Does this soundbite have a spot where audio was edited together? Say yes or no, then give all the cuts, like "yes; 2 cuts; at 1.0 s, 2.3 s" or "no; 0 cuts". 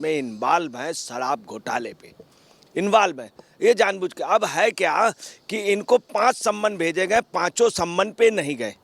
no; 0 cuts